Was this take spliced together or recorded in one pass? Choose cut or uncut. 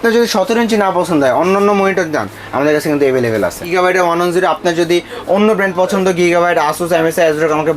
cut